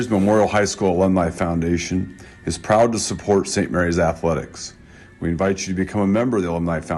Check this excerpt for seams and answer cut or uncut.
uncut